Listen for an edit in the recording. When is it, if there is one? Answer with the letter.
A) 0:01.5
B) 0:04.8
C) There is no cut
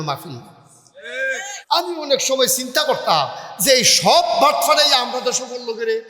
A